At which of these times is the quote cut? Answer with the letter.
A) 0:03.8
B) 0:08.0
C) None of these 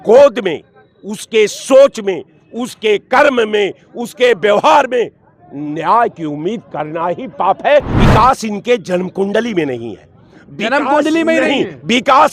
B